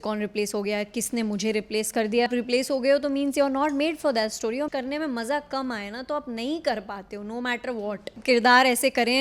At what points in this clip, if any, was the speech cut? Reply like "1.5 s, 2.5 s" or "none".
2.3 s, 4.7 s, 8.2 s